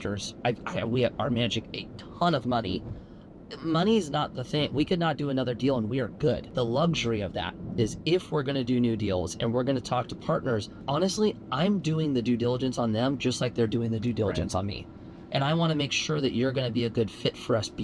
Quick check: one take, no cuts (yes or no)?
yes